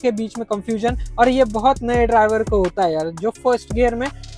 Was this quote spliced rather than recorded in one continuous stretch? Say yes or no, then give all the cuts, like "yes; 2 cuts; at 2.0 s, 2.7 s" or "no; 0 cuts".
no; 0 cuts